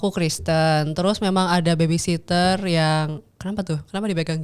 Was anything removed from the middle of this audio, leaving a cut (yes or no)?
no